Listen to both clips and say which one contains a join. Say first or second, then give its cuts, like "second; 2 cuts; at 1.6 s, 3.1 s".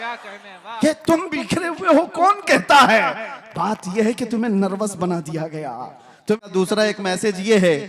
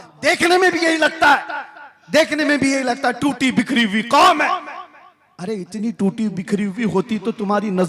first; 1 cut; at 6.4 s